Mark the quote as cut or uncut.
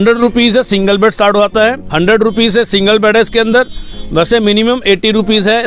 cut